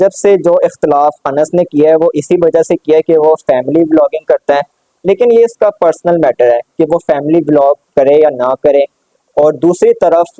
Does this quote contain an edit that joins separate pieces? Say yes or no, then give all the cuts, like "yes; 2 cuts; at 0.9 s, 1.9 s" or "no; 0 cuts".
no; 0 cuts